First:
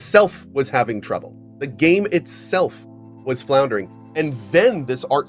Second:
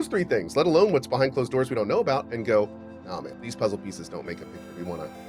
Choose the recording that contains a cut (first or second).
second